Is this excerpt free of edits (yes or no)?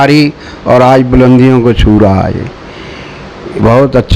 yes